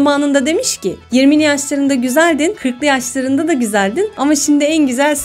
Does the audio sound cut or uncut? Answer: uncut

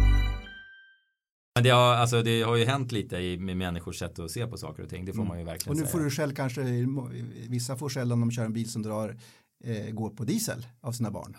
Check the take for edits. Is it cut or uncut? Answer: cut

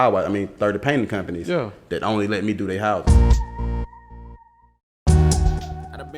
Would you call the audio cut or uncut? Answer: cut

